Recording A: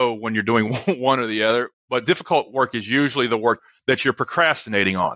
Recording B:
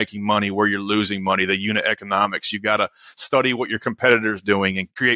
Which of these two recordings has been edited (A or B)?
A